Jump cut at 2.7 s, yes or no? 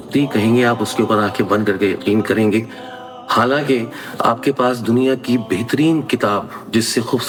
no